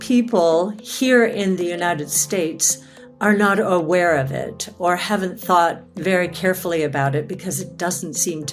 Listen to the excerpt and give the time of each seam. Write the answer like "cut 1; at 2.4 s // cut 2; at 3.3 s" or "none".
none